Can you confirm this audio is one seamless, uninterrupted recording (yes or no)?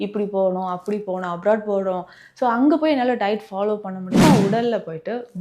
no